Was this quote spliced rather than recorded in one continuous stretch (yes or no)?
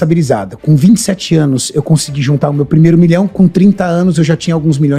no